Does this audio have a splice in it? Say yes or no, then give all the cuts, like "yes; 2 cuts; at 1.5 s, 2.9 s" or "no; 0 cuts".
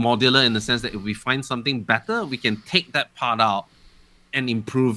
no; 0 cuts